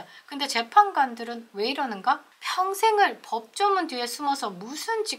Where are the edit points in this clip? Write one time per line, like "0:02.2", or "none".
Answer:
0:02.4